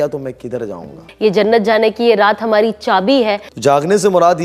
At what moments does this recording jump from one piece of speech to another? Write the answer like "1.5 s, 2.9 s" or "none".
1.0 s, 3.4 s